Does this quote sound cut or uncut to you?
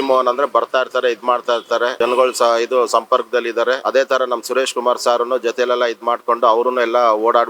cut